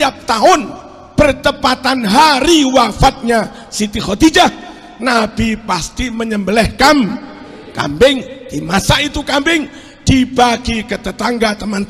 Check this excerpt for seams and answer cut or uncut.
uncut